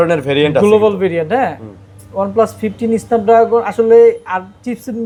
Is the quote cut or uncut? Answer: uncut